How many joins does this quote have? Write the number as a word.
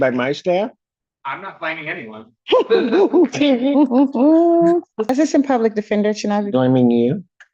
one